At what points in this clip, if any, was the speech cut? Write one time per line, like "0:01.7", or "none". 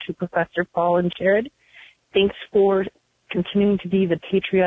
0:01.1